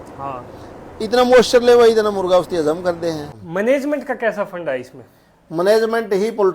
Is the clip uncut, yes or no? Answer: no